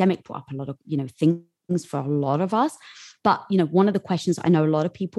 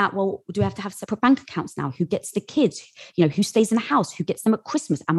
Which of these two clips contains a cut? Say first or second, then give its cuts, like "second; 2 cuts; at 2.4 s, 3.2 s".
second; 1 cut; at 0.9 s